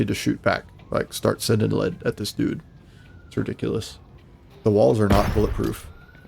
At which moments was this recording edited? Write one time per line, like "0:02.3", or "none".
0:04.5